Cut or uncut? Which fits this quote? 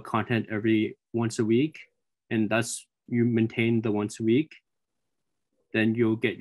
uncut